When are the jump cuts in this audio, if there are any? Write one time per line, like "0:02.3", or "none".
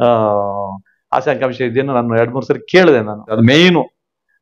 0:03.3